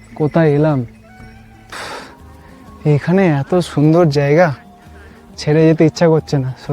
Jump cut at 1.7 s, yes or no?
yes